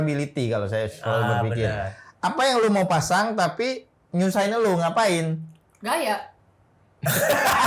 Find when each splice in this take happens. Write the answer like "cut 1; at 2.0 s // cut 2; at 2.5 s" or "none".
none